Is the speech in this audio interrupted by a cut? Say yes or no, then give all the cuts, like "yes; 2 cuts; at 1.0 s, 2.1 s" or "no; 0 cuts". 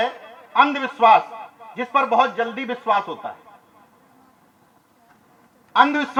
no; 0 cuts